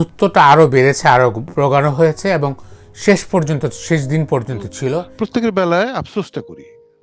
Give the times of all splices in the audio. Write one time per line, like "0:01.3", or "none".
0:05.1